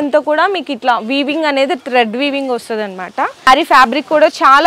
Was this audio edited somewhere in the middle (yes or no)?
yes